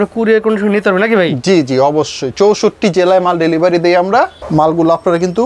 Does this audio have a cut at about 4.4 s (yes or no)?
no